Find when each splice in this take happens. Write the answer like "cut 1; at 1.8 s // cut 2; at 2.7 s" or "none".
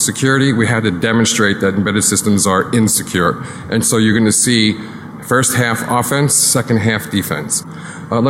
none

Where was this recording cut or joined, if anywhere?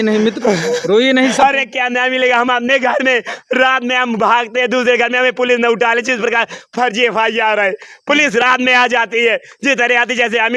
cut 1; at 1.3 s

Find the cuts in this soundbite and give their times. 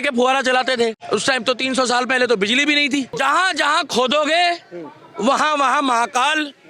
cut 1; at 1.0 s // cut 2; at 3.1 s

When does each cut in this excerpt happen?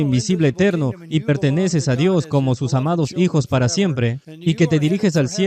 cut 1; at 4.3 s

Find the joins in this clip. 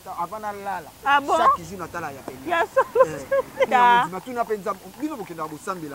cut 1; at 3.7 s

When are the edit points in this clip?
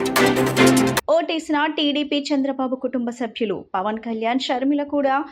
cut 1; at 1.0 s

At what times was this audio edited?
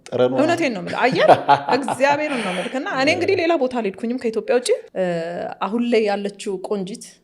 cut 1; at 4.9 s

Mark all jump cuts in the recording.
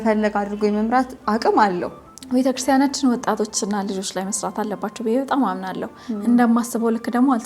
cut 1; at 2.1 s

